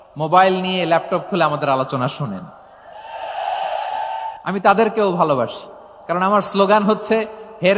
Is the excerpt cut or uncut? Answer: cut